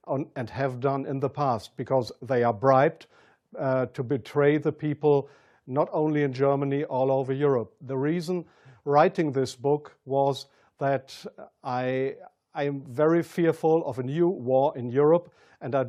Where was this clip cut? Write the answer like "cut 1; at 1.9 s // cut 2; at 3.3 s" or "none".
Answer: none